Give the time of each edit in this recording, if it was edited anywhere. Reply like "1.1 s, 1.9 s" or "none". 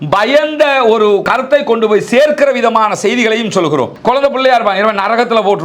1.2 s, 3.9 s